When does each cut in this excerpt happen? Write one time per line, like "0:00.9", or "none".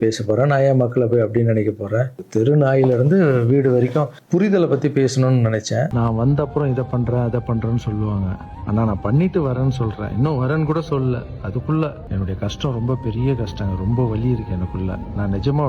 0:05.9
0:12.0